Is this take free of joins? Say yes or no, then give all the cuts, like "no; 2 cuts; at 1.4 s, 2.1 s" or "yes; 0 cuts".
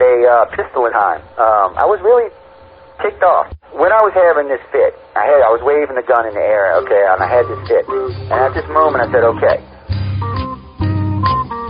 no; 1 cut; at 0.9 s